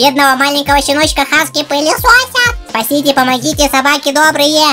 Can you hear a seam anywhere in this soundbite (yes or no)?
no